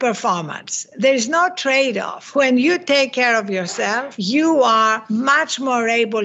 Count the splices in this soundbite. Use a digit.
3